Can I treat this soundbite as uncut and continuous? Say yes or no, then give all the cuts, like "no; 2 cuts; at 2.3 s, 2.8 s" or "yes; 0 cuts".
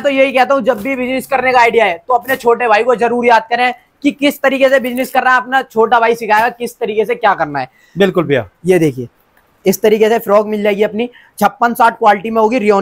yes; 0 cuts